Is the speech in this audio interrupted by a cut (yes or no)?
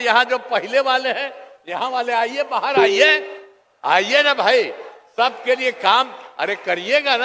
no